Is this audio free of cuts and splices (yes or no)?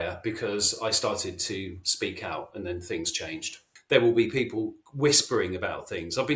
no